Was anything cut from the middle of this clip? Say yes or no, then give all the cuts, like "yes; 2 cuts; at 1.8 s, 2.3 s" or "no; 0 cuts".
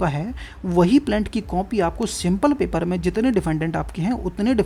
no; 0 cuts